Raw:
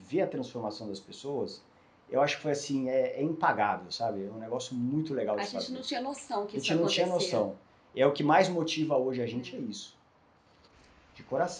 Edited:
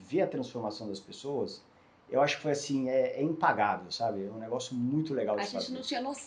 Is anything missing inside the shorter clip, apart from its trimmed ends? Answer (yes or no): no